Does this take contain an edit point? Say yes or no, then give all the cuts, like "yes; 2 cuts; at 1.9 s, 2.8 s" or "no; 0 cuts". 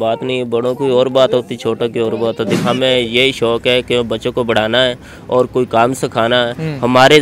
yes; 1 cut; at 2.5 s